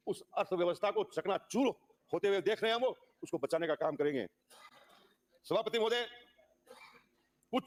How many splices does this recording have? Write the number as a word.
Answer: zero